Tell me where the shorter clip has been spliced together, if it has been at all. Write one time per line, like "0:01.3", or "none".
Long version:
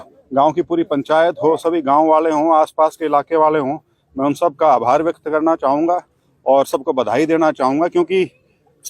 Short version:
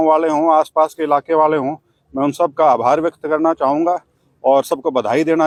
none